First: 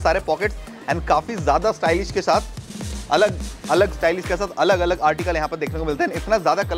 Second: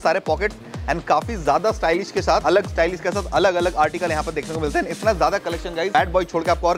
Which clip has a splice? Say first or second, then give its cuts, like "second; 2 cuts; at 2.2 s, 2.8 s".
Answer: second; 2 cuts; at 2.4 s, 5.9 s